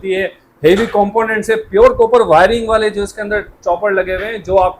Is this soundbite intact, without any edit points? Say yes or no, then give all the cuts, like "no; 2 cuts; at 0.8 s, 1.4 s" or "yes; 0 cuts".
yes; 0 cuts